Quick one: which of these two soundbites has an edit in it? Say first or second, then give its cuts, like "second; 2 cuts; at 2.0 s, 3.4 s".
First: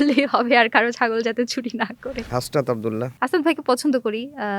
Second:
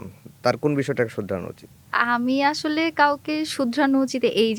first; 2 cuts; at 2.3 s, 3.1 s